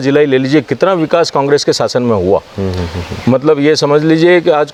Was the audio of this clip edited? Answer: no; 0 cuts

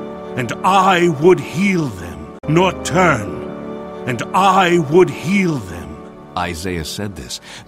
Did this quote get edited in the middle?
no; 0 cuts

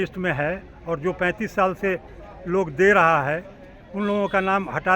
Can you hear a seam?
no; 0 cuts

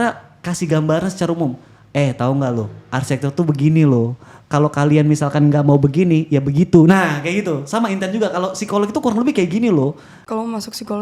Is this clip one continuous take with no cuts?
no; 1 cut; at 10.1 s

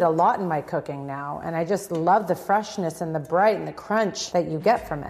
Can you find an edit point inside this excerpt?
yes; 1 cut; at 4.2 s

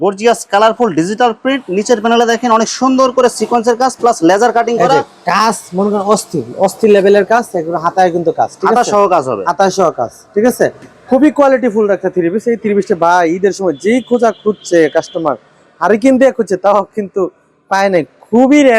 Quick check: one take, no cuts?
yes; 0 cuts

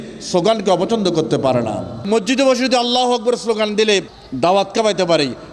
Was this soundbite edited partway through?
yes; 2 cuts; at 2.0 s, 4.2 s

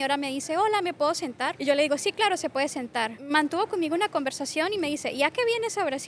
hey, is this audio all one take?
no; 2 cuts; at 1.6 s, 3.2 s

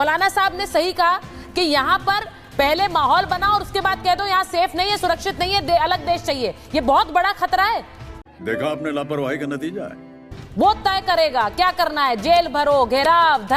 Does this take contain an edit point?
no; 0 cuts

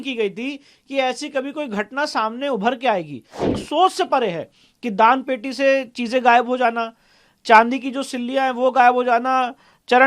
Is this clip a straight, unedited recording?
no; 1 cut; at 3.5 s

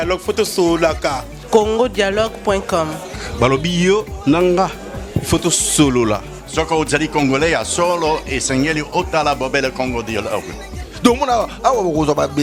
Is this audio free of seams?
yes; 0 cuts

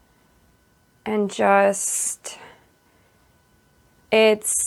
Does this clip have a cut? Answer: no; 0 cuts

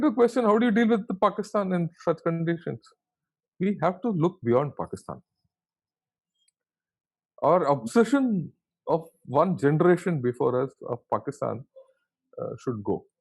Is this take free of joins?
yes; 0 cuts

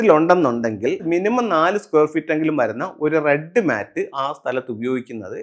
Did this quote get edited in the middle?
yes; 1 cut; at 1.0 s

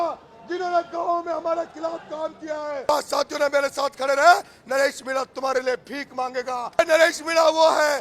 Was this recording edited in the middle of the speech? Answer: yes; 2 cuts; at 2.9 s, 6.8 s

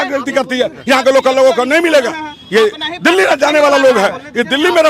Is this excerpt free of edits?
yes; 0 cuts

